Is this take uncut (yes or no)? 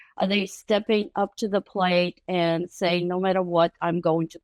yes